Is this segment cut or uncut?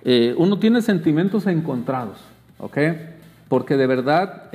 uncut